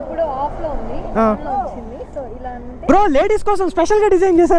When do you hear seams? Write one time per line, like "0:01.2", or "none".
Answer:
0:02.9